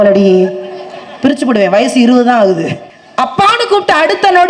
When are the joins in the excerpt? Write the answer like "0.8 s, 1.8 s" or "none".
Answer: 2.9 s